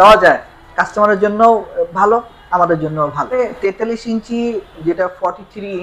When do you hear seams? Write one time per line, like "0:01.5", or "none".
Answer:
0:03.3